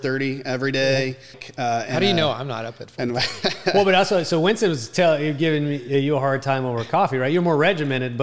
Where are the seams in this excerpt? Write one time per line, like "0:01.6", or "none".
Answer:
0:01.4